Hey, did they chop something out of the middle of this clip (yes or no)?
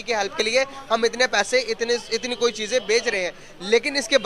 no